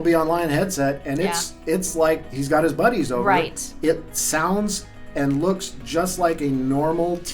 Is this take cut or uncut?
cut